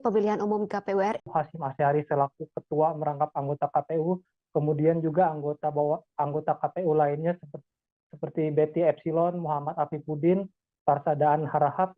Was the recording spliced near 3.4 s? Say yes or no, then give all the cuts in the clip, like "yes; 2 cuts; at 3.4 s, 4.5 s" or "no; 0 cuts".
no; 1 cut; at 1.2 s